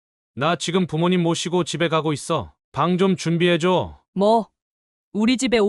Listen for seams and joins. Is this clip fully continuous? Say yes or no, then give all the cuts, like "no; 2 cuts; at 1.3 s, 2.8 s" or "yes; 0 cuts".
no; 1 cut; at 4.0 s